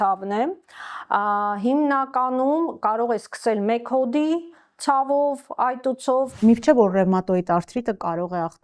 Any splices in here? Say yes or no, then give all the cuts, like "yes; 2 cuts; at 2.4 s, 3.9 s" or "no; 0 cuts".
yes; 1 cut; at 6.4 s